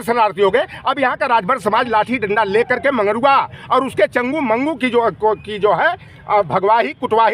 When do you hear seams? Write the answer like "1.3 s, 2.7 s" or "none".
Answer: none